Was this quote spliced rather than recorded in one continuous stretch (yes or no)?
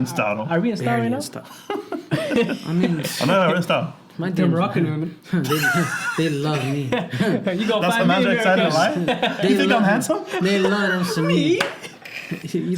no